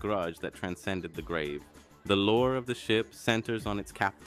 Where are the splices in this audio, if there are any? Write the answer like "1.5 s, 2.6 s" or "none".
1.1 s